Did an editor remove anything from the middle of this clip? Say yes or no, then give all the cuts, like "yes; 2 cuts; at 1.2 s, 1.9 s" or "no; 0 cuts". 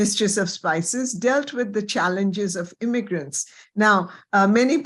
no; 0 cuts